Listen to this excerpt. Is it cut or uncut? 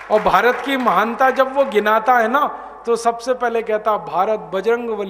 uncut